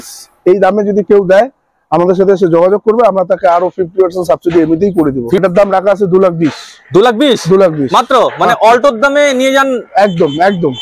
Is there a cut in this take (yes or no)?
no